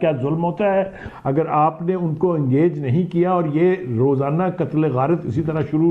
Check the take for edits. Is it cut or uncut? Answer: cut